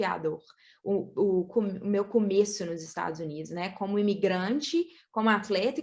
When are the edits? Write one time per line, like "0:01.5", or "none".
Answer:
none

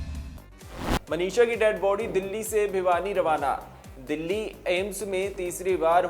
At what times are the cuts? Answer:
0:00.9

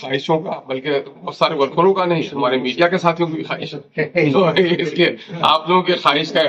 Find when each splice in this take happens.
none

